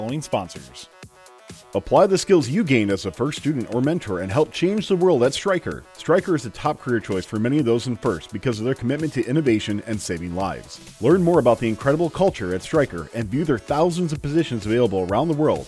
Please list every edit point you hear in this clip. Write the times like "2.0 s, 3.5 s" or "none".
1.2 s